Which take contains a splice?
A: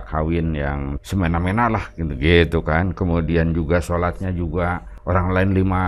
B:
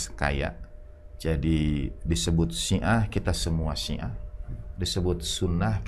A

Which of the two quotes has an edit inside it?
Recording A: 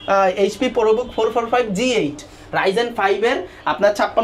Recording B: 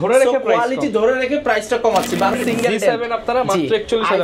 B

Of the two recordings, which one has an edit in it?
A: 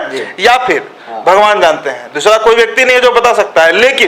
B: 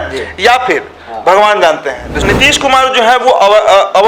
B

